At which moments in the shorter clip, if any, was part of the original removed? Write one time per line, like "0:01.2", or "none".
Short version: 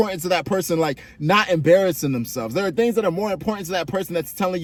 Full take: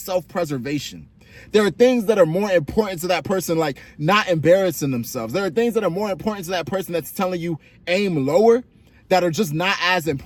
none